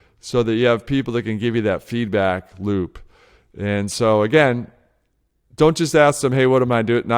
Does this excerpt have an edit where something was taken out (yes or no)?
no